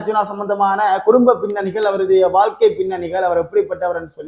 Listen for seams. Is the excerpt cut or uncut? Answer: uncut